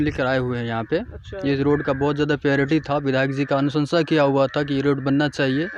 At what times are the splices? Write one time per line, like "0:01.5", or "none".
none